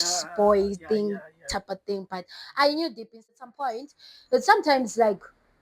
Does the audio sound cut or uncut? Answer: cut